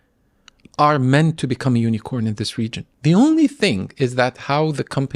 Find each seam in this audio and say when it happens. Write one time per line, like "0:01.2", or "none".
0:02.8